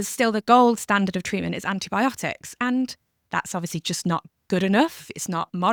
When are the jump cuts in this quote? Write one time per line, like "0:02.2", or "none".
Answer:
none